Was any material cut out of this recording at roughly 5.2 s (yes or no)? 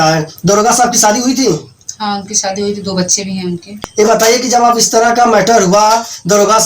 no